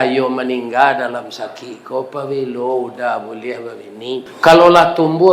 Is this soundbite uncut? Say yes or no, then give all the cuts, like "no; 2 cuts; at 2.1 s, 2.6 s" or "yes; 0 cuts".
no; 1 cut; at 4.3 s